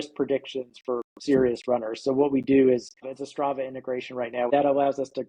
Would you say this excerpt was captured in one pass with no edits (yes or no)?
no